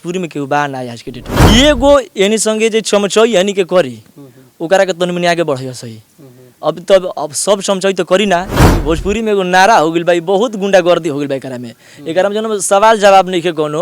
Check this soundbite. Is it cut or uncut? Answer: cut